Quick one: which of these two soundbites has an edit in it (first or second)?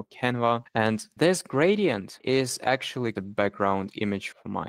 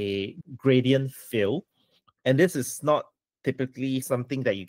first